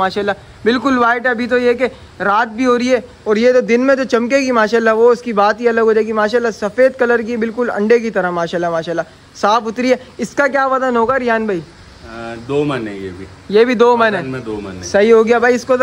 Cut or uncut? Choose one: uncut